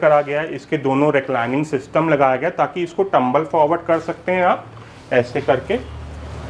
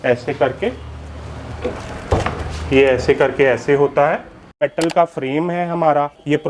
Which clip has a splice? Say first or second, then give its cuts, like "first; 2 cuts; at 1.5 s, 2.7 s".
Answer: second; 1 cut; at 4.6 s